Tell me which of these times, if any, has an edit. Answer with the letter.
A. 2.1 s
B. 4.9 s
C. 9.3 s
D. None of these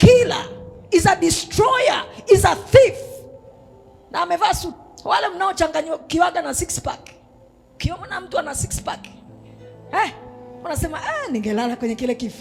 B